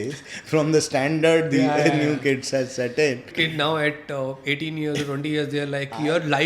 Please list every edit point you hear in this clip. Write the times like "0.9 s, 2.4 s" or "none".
3.3 s